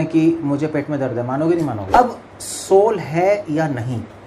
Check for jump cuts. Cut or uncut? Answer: cut